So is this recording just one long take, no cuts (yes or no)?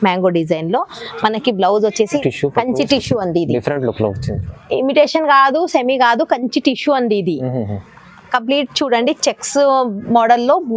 no